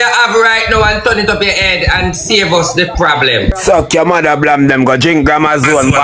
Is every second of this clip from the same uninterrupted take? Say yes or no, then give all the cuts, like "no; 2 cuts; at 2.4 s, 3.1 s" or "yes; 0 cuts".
no; 1 cut; at 3.6 s